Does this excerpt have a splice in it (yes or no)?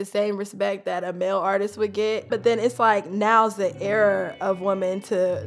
no